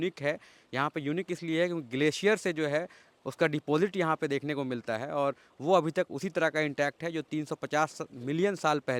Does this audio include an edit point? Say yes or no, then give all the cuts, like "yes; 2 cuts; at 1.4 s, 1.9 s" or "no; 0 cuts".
no; 0 cuts